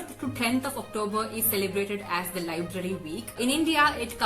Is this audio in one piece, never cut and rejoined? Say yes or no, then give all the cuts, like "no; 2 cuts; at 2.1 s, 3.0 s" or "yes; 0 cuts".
no; 1 cut; at 3.3 s